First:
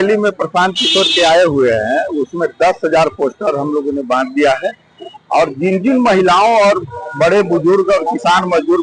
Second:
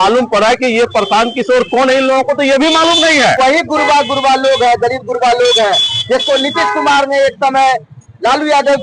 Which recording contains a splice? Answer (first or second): second